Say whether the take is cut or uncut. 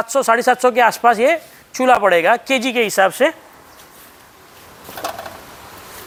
uncut